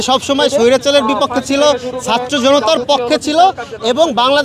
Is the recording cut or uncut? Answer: uncut